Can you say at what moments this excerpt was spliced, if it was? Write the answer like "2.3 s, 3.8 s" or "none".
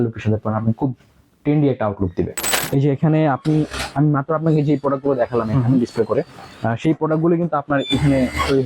2.5 s